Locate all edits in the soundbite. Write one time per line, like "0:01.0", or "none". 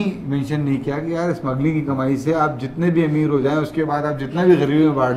none